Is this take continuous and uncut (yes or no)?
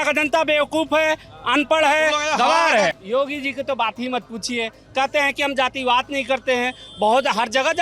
no